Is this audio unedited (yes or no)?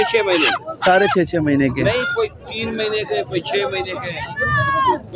yes